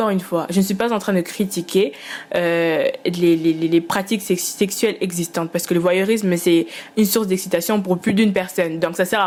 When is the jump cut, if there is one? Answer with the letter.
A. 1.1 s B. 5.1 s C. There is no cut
C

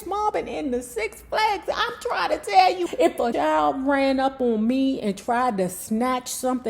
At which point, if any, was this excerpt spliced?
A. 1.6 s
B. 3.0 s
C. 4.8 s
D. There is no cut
B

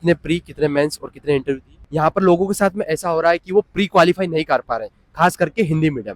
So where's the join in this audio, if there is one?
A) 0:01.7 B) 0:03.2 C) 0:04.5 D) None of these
A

